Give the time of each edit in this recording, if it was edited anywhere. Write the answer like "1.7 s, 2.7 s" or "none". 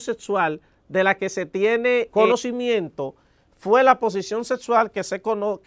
2.1 s